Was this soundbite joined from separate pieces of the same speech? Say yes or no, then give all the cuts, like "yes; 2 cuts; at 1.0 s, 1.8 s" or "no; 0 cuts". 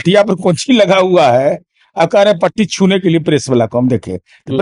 no; 0 cuts